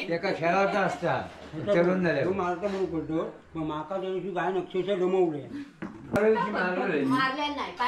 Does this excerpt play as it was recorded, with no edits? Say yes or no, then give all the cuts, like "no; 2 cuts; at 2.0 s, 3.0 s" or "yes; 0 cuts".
no; 1 cut; at 6.2 s